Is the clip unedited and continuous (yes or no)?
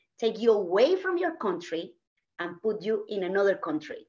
yes